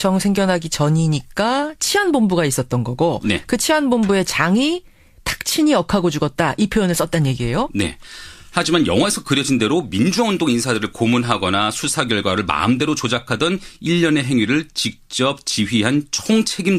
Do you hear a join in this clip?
yes; 1 cut; at 11.4 s

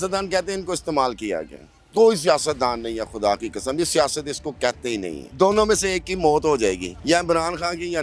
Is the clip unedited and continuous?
no; 2 cuts; at 5.2 s, 6.9 s

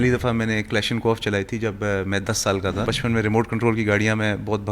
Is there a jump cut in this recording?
yes; 1 cut; at 2.9 s

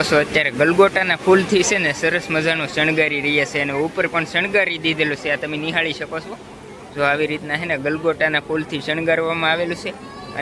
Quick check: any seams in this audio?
no; 0 cuts

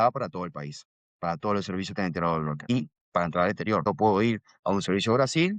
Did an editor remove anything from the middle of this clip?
yes; 2 cuts; at 2.7 s, 3.8 s

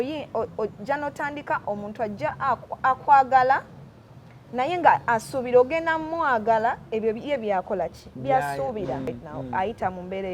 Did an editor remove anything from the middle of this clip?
yes; 1 cut; at 9.1 s

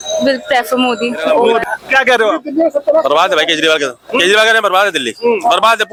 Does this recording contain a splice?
no; 0 cuts

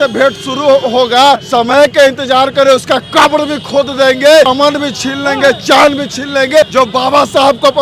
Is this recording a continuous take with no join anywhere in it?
no; 3 cuts; at 1.4 s, 4.5 s, 6.7 s

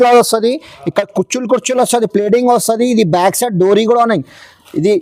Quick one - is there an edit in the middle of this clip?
no; 0 cuts

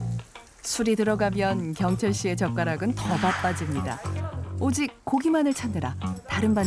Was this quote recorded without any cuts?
yes; 0 cuts

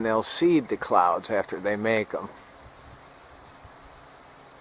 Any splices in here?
no; 0 cuts

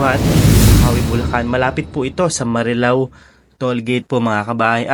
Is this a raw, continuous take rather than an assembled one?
yes; 0 cuts

